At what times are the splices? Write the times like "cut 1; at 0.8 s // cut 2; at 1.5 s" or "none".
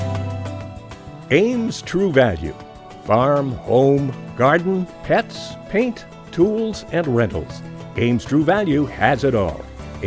none